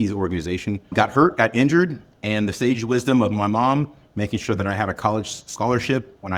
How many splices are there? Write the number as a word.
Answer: one